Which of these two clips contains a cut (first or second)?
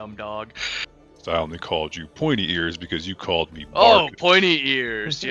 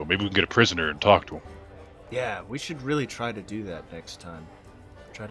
first